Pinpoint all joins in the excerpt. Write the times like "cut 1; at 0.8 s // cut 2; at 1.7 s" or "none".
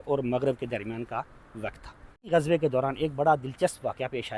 cut 1; at 2.3 s